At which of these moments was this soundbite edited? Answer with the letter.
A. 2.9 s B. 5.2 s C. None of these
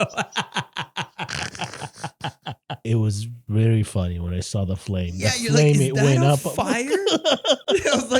A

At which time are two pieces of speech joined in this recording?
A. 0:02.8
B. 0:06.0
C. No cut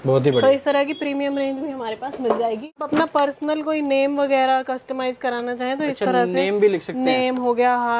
A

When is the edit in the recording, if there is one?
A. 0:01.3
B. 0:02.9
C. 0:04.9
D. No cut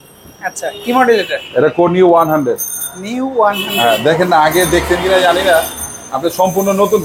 D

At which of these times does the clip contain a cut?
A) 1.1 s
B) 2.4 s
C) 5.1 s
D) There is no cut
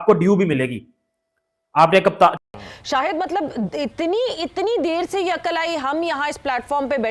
B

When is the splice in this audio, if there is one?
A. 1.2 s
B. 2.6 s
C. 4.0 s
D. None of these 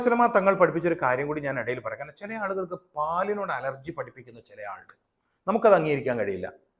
D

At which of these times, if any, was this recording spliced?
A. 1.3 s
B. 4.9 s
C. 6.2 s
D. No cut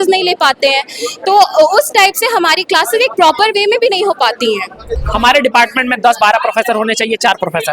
B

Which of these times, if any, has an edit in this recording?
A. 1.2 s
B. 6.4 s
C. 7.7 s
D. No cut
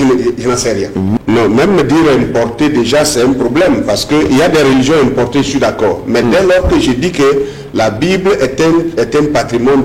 A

